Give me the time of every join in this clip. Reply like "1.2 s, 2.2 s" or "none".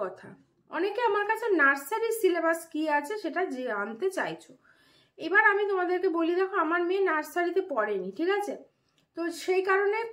none

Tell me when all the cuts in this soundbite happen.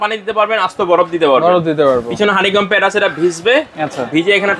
none

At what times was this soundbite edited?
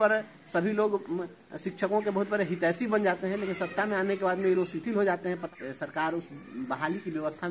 5.4 s

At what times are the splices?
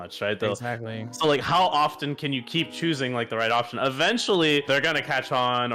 4.7 s

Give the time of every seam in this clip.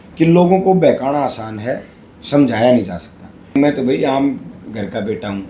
3.5 s

